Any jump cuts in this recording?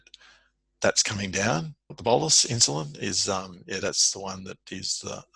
yes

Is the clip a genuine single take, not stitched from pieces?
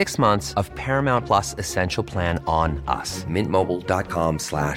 yes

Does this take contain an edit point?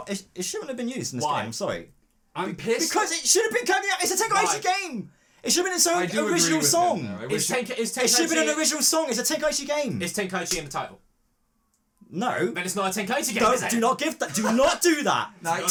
no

